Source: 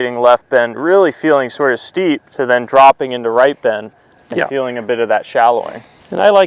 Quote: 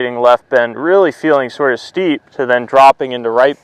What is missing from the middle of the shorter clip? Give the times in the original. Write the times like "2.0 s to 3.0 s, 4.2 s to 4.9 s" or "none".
none